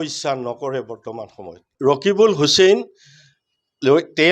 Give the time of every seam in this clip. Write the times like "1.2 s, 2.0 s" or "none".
1.7 s

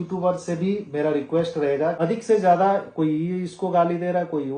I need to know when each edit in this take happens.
2.0 s

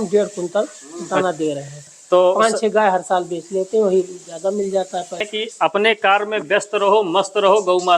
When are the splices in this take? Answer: 1.7 s, 5.3 s

